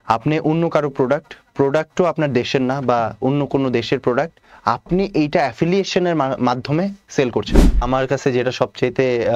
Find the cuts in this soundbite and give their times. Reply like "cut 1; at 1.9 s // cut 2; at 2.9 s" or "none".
cut 1; at 7.9 s